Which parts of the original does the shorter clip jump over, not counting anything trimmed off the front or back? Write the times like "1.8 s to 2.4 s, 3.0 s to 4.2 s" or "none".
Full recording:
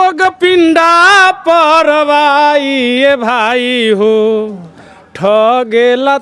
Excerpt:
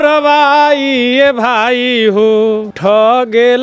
4.5 s to 5.1 s